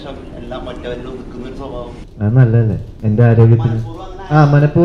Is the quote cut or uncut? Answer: cut